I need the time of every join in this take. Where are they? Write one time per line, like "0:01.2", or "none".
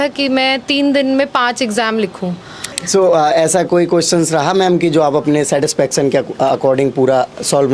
0:02.7